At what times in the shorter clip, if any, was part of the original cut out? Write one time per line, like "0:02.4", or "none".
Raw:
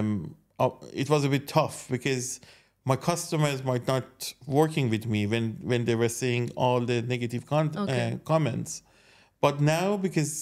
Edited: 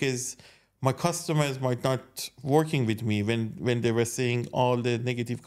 none